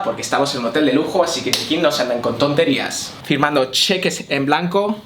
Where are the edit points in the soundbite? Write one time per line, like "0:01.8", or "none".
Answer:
0:03.1